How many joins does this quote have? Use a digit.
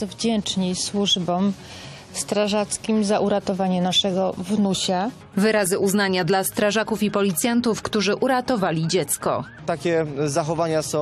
1